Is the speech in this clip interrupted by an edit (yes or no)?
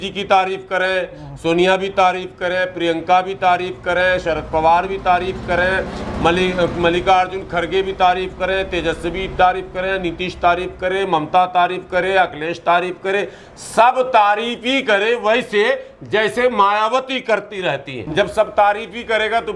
yes